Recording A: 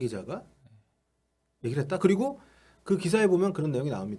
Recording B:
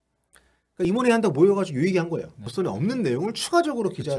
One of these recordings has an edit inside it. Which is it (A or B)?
B